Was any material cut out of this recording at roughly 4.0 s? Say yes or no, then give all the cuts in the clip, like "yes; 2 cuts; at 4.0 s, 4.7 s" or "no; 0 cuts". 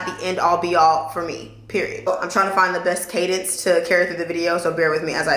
no; 1 cut; at 2.1 s